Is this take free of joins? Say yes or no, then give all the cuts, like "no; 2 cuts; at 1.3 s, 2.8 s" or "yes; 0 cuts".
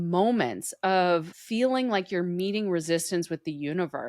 no; 1 cut; at 1.3 s